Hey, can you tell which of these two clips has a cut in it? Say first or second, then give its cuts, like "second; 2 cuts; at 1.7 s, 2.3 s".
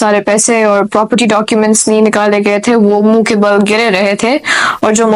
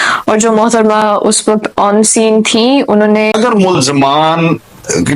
second; 1 cut; at 3.3 s